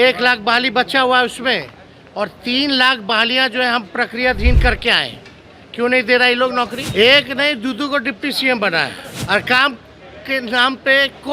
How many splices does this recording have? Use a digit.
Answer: 2